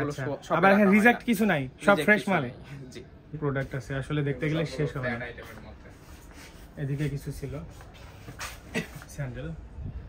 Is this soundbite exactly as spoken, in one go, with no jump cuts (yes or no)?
no